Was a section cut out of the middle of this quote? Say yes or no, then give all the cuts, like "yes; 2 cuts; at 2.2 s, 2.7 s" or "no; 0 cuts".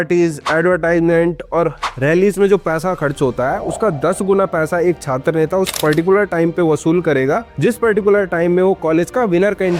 no; 0 cuts